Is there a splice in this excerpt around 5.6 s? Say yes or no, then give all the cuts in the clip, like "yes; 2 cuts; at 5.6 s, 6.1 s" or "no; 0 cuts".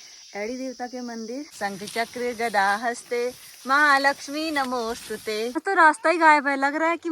yes; 2 cuts; at 1.5 s, 5.6 s